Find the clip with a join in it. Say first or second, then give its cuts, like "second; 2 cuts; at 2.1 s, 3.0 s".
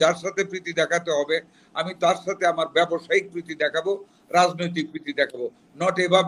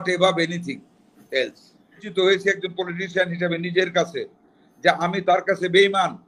second; 1 cut; at 2.0 s